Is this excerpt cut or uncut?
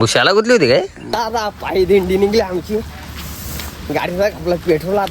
cut